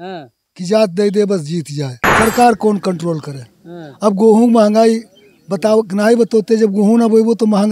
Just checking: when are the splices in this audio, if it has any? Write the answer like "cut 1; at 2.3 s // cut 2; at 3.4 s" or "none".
cut 1; at 2.0 s